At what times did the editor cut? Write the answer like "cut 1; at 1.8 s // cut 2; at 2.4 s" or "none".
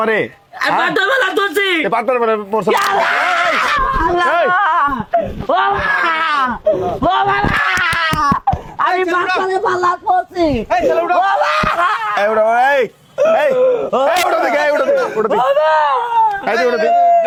none